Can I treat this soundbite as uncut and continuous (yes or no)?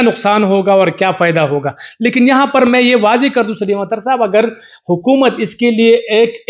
yes